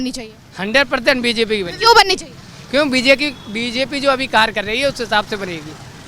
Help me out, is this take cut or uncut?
uncut